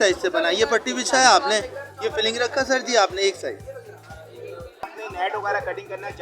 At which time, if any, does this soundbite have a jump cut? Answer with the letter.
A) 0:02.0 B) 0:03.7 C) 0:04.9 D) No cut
C